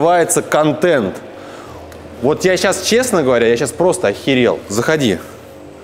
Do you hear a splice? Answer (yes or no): no